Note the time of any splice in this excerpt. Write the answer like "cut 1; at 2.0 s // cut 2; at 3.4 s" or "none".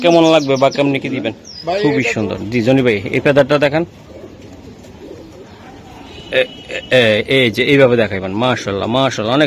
cut 1; at 1.4 s